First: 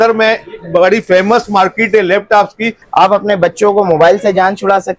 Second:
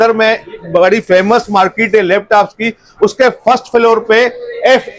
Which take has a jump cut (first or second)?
first